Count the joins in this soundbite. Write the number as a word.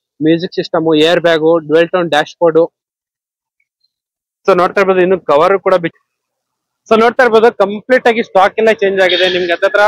one